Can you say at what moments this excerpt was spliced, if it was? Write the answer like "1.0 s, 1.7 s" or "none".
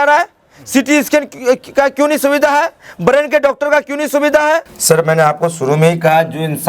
4.7 s